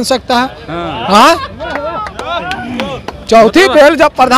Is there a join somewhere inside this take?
no; 0 cuts

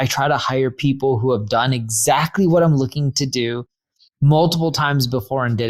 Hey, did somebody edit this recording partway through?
no; 0 cuts

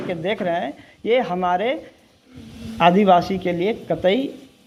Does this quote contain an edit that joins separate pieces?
no; 0 cuts

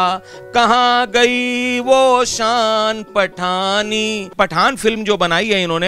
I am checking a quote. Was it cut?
yes; 1 cut; at 4.3 s

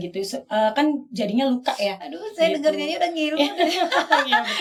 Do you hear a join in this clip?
no; 0 cuts

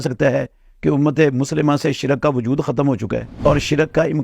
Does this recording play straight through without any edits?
no; 1 cut; at 3.3 s

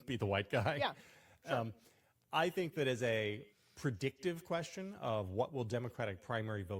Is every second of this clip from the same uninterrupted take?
yes; 0 cuts

